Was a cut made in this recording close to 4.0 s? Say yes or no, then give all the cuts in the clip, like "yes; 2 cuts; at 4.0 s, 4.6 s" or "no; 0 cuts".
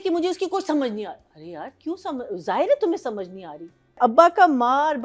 yes; 1 cut; at 4.0 s